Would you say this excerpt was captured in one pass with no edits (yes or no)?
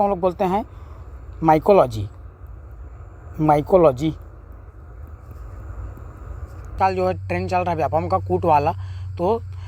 no